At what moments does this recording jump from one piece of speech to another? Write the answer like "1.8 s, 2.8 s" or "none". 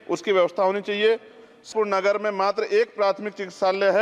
1.7 s